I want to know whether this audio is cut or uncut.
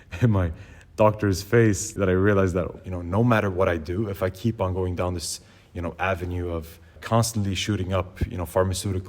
cut